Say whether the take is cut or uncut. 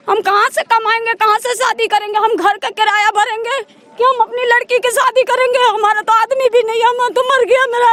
uncut